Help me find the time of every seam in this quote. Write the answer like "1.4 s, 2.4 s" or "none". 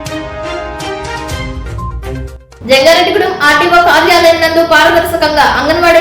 2.0 s